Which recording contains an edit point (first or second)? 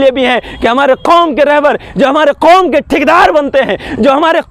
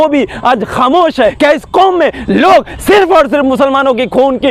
second